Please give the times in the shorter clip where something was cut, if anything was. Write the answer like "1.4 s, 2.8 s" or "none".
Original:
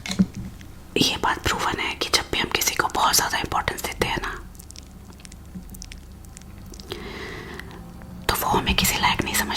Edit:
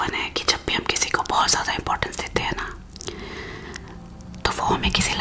3.0 s